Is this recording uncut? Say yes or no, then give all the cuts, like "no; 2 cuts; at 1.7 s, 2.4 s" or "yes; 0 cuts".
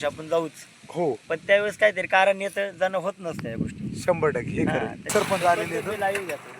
no; 1 cut; at 5.0 s